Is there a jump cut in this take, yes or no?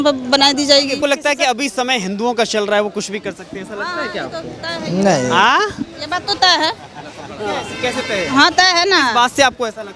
yes